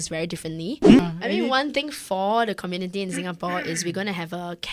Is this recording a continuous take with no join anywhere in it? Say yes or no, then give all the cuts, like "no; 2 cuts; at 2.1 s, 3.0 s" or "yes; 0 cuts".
no; 1 cut; at 1.0 s